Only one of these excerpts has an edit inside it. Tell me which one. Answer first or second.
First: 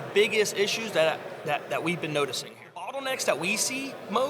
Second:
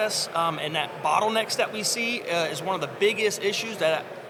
first